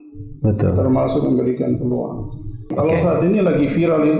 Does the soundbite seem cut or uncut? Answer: cut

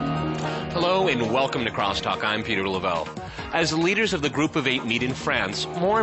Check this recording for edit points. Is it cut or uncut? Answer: uncut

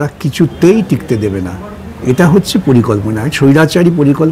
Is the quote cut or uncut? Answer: uncut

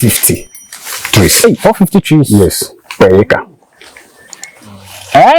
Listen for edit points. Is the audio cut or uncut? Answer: uncut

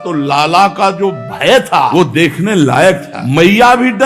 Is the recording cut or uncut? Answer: cut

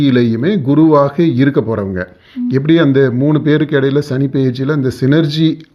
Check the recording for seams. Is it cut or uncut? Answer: uncut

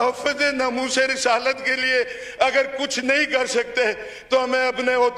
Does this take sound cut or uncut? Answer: uncut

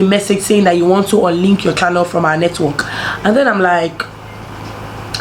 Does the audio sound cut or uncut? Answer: uncut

